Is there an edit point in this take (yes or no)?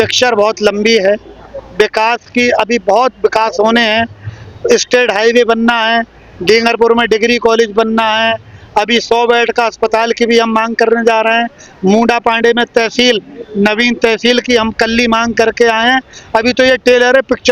no